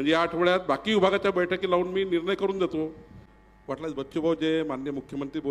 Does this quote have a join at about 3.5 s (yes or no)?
yes